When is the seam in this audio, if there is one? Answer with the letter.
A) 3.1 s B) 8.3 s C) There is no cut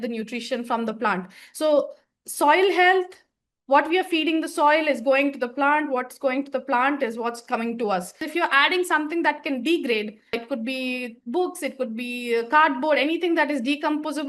B